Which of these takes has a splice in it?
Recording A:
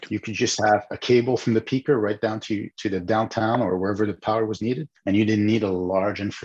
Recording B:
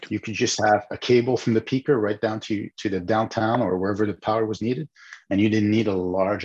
A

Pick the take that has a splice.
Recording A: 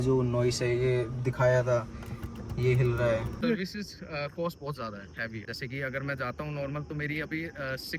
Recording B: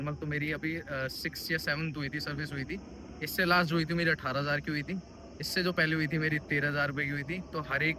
A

